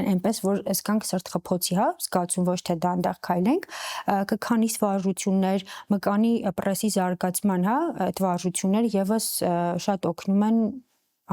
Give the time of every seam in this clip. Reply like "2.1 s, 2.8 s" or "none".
none

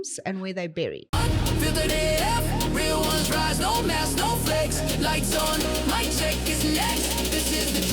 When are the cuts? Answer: 1.0 s

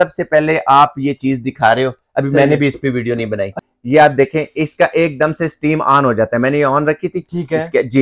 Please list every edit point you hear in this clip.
3.6 s

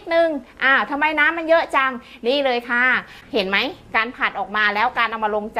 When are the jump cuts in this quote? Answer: 3.2 s

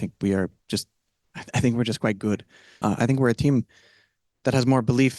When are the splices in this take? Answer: 2.8 s

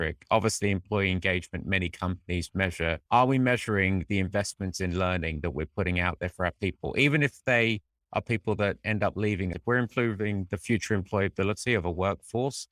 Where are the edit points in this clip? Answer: 9.5 s

